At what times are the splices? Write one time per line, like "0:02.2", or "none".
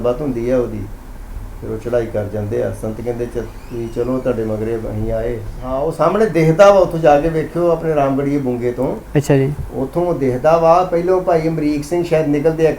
0:05.6